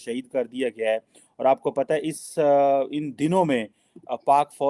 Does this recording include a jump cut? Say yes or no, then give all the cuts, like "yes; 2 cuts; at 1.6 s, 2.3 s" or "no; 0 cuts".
no; 0 cuts